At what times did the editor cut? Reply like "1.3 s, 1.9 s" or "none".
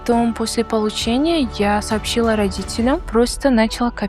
3.1 s